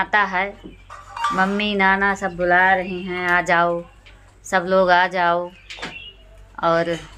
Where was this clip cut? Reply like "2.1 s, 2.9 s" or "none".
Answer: none